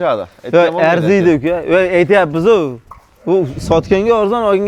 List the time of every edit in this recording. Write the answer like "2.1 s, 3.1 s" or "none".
none

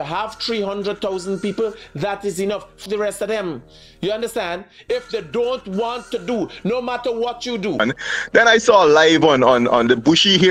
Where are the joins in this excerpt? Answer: 2.8 s, 7.8 s

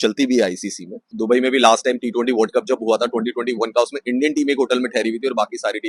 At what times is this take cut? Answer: 1.1 s

